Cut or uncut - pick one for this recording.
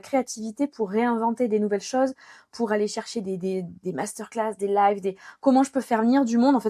uncut